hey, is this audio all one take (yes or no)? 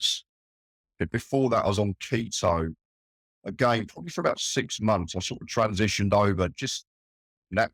yes